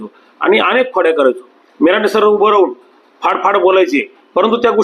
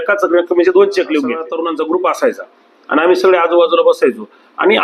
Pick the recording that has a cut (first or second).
second